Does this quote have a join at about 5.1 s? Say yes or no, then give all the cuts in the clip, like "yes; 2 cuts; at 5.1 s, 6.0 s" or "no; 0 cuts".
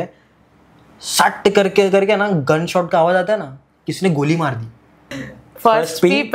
yes; 1 cut; at 5.1 s